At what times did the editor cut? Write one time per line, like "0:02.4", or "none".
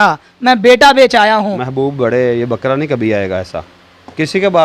0:01.6